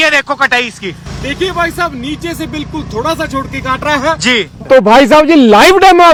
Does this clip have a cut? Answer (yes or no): no